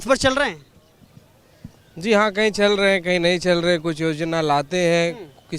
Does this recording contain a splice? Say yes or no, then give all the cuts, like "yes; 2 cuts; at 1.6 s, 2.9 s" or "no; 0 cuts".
no; 0 cuts